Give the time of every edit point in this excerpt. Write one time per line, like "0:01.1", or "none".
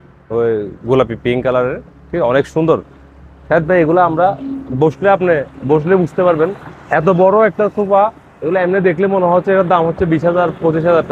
none